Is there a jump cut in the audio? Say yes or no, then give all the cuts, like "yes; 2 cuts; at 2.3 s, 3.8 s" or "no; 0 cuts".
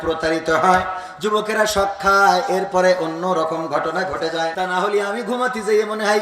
yes; 1 cut; at 4.5 s